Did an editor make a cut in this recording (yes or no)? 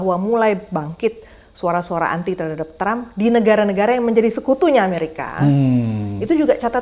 no